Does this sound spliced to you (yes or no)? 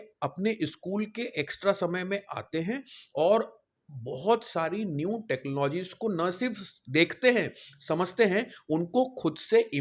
no